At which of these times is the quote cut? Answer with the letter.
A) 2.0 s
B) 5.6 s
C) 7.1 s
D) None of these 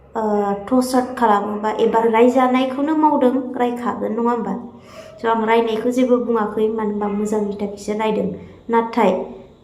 A